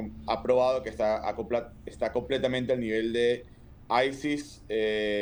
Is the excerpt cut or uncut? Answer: uncut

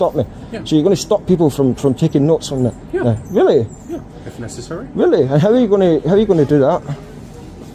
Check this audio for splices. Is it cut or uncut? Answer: cut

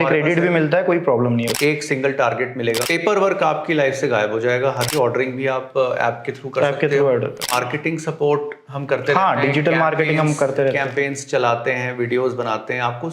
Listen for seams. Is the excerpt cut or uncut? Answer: cut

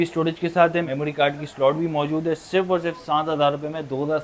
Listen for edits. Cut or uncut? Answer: uncut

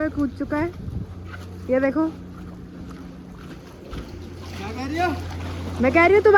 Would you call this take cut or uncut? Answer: uncut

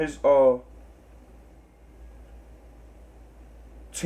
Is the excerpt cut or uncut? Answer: cut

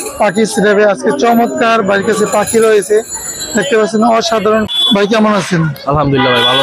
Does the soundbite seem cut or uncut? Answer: cut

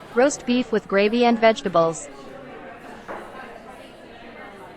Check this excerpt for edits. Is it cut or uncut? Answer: cut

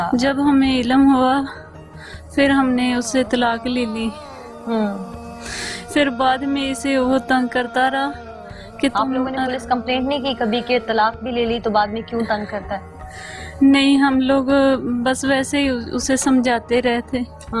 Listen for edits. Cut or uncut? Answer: uncut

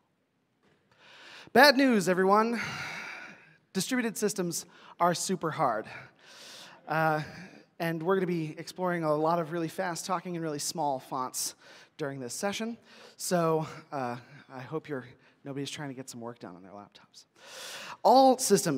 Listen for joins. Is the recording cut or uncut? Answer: cut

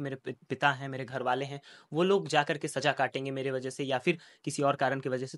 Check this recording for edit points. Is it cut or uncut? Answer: uncut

